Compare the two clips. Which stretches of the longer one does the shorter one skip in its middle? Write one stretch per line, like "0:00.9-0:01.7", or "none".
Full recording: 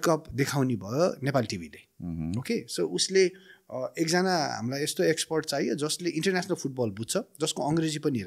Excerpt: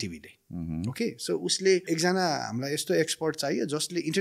0:03.3-0:03.9